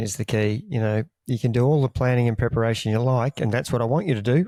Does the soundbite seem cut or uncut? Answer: uncut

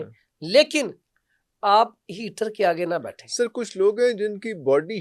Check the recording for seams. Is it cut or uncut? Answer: uncut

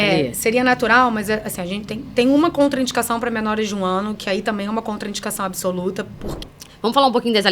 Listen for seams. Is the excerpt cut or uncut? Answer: cut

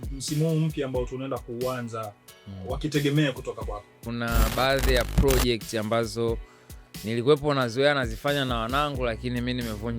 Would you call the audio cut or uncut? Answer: cut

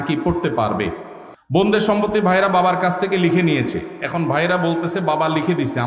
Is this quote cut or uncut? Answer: cut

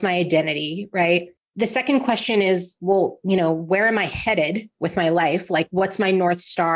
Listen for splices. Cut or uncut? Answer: cut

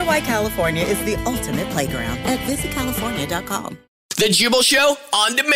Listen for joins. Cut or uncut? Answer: cut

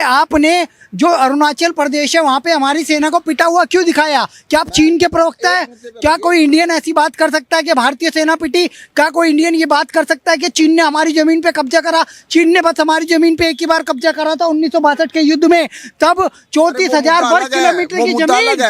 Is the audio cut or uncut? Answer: uncut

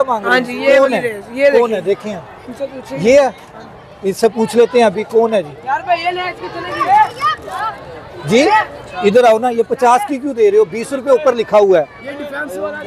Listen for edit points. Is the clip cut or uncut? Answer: uncut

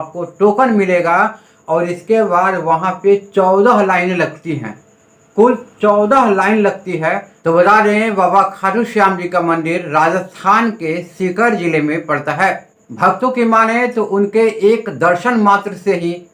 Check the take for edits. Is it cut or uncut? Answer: cut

